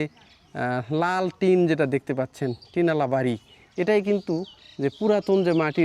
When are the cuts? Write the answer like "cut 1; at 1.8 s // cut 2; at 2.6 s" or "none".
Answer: none